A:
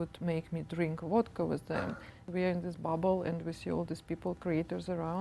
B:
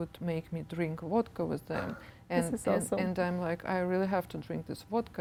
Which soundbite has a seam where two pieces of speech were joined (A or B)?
A